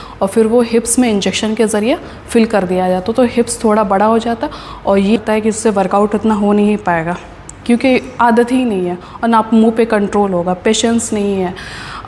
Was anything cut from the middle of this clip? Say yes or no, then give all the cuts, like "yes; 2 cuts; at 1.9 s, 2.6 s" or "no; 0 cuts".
yes; 1 cut; at 5.2 s